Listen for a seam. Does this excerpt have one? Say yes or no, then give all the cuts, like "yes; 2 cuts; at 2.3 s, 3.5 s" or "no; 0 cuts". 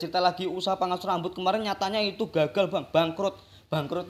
no; 0 cuts